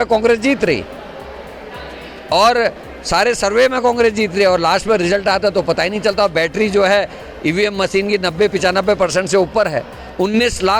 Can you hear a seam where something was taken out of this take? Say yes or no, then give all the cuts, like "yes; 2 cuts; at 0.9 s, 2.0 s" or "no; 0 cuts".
no; 0 cuts